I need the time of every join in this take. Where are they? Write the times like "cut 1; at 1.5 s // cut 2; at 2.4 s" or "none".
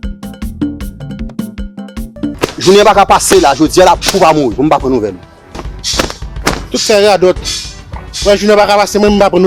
cut 1; at 2.1 s // cut 2; at 5.7 s